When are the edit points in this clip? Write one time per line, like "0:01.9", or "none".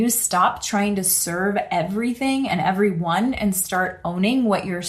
none